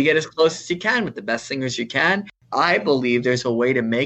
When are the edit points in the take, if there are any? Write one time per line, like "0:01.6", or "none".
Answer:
0:02.4